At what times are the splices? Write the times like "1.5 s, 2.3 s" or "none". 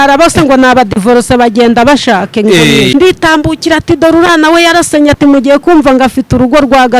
2.9 s